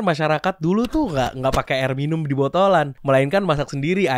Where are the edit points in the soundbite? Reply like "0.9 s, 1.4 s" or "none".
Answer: none